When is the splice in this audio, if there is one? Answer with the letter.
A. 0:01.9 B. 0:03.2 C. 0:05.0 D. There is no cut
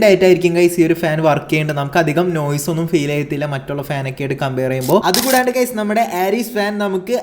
C